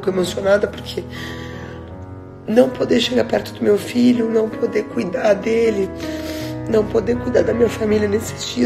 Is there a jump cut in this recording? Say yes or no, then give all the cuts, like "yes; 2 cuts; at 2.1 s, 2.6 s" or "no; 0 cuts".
no; 0 cuts